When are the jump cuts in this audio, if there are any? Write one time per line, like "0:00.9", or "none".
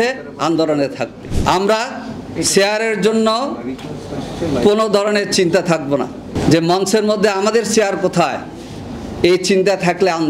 0:01.3
0:06.4